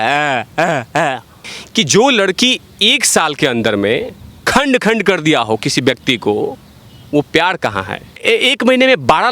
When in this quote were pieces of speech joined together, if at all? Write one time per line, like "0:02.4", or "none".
0:01.5
0:08.2

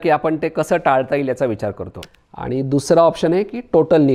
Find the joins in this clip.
0:01.9

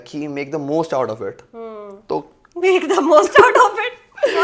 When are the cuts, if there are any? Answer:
none

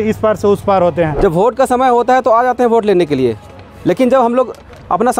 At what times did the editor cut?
0:01.1

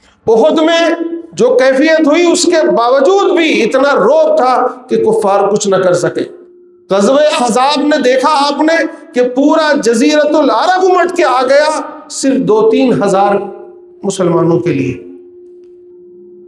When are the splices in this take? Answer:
none

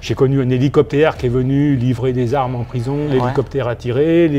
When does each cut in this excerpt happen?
0:03.1

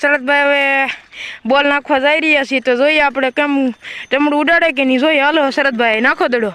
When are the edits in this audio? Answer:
none

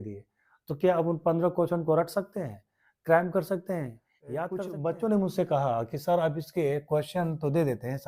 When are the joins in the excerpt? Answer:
0:04.6

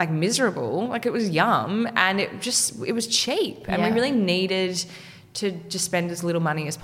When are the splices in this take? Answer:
none

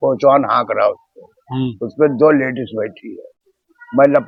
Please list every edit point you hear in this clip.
none

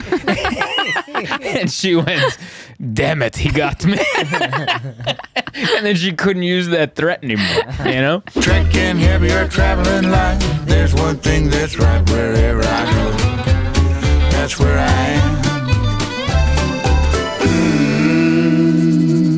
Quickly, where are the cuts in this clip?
0:08.3

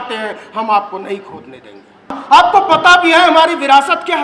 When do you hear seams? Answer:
0:02.2

